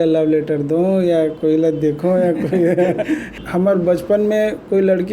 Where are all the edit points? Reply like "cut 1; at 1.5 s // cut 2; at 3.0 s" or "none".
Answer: cut 1; at 3.3 s

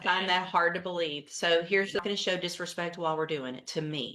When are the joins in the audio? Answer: cut 1; at 2.0 s

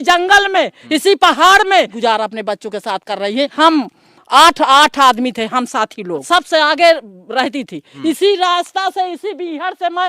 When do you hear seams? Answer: cut 1; at 1.9 s // cut 2; at 3.5 s // cut 3; at 6.2 s // cut 4; at 7.9 s

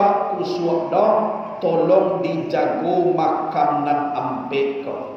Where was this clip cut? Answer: none

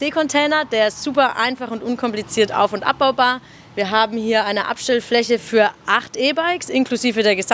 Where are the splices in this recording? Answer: none

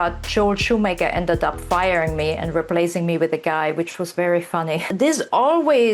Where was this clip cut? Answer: cut 1; at 4.9 s

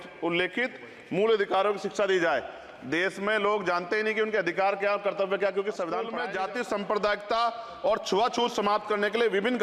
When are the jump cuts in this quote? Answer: cut 1; at 6.2 s

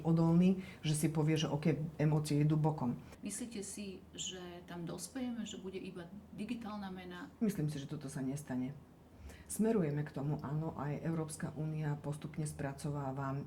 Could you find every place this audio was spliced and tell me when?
cut 1; at 3.2 s // cut 2; at 7.3 s

